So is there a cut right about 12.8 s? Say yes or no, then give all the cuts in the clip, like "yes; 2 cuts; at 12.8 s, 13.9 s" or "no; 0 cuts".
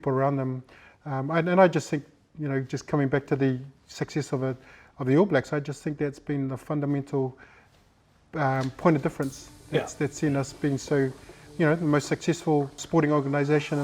yes; 1 cut; at 12.8 s